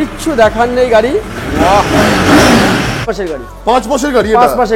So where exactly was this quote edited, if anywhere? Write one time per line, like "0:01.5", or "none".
0:03.1